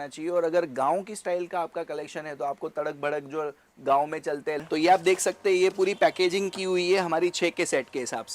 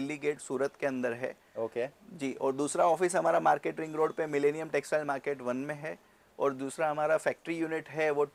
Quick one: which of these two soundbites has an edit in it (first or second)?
first